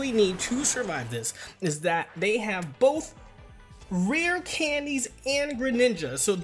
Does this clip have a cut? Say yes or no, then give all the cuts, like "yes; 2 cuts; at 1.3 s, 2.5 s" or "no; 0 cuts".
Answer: no; 0 cuts